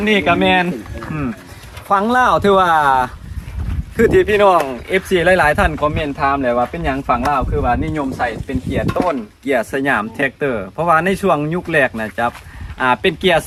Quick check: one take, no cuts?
yes; 0 cuts

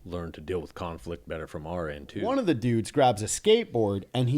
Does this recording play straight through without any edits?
no; 1 cut; at 2.2 s

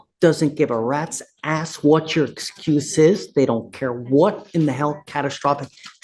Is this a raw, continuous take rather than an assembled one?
yes; 0 cuts

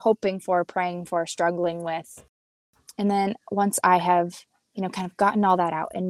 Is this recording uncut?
no; 1 cut; at 2.6 s

